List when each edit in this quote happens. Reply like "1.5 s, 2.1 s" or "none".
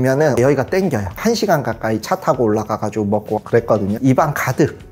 1.1 s, 4.0 s

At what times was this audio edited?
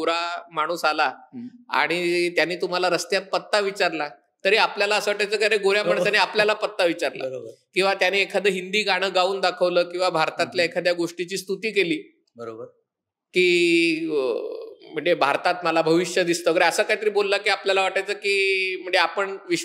none

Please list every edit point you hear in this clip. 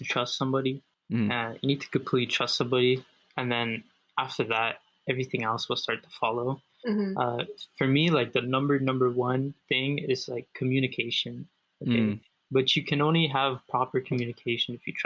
0.9 s

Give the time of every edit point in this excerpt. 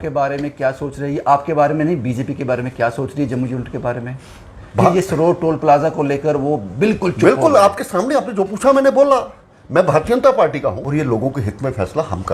10.8 s

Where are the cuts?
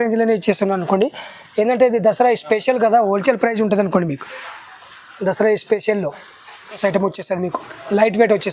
6.8 s

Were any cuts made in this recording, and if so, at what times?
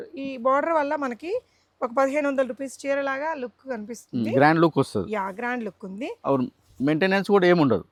none

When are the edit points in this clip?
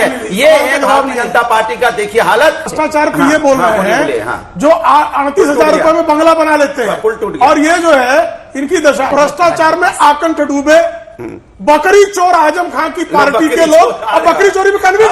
2.7 s

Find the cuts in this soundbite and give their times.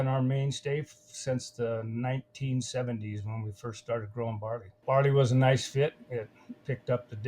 4.7 s

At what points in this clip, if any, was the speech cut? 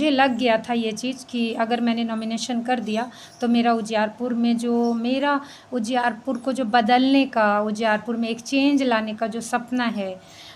none

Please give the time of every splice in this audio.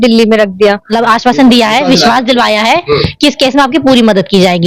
0.9 s

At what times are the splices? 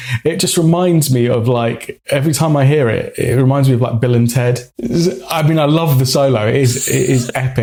none

